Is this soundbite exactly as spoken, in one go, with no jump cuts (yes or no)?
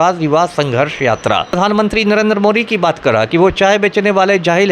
no